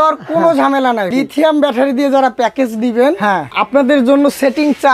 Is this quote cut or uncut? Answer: cut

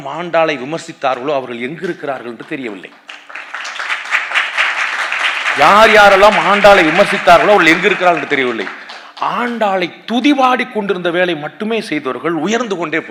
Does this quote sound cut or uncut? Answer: uncut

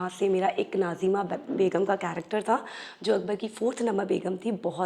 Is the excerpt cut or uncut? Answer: uncut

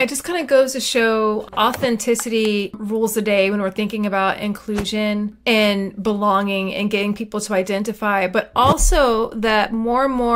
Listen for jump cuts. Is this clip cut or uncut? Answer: cut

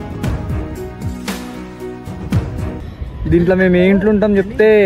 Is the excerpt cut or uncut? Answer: cut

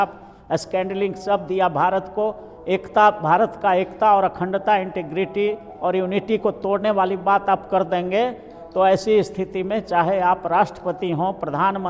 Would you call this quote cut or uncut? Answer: uncut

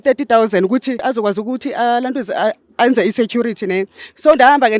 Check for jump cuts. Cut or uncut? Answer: cut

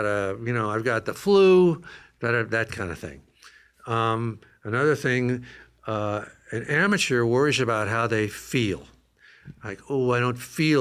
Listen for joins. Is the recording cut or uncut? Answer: uncut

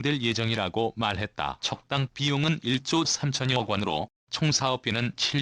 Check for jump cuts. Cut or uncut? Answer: cut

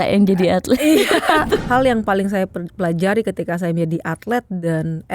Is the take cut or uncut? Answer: cut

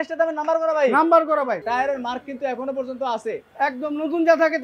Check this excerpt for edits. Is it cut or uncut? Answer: cut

